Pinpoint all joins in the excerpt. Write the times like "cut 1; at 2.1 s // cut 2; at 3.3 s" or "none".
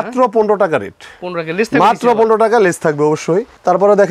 none

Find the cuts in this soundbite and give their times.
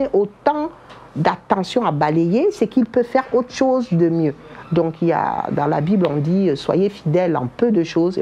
none

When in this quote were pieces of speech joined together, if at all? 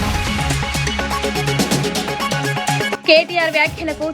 cut 1; at 2.9 s

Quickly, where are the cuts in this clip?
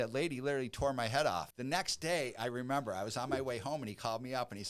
cut 1; at 1.5 s

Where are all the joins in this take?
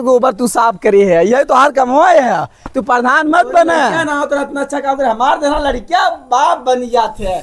cut 1; at 4.0 s

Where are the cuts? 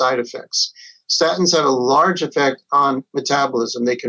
none

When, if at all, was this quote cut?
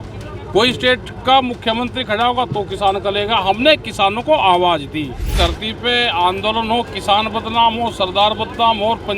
cut 1; at 5.3 s

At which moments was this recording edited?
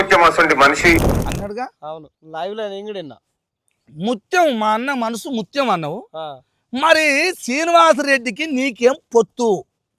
none

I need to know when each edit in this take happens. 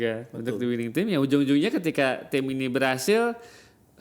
none

